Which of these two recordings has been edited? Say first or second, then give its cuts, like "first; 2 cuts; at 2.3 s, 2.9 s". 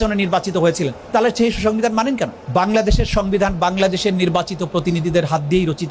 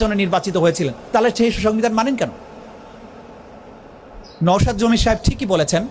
first; 1 cut; at 2.4 s